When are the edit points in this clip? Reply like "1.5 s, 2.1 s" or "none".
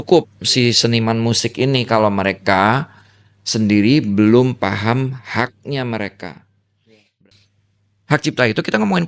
7.1 s